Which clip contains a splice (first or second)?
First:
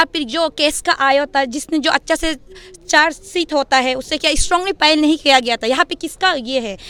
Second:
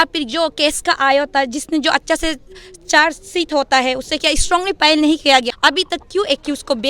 second